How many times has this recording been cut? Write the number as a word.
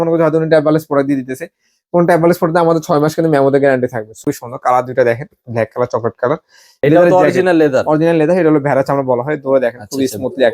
two